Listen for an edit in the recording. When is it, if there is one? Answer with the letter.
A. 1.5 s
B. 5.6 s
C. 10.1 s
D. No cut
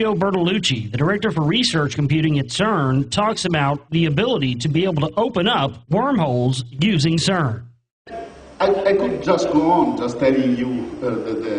B